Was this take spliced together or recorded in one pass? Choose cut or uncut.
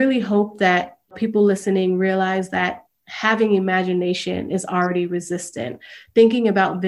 cut